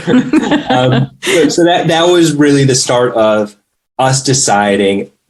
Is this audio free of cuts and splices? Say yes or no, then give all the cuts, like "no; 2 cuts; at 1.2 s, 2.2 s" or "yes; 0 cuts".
yes; 0 cuts